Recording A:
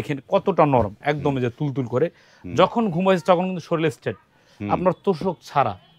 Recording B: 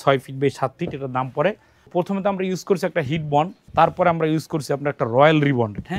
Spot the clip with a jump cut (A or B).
B